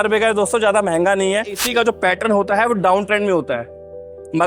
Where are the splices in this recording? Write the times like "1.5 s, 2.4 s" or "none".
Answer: 1.6 s